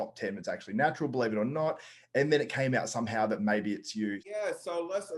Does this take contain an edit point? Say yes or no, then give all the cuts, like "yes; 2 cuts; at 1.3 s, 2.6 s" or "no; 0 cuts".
yes; 1 cut; at 4.3 s